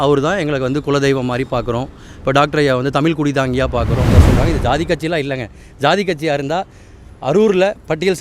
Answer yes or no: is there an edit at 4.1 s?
yes